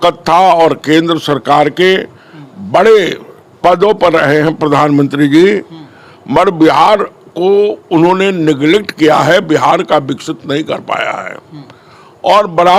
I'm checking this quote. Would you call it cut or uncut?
uncut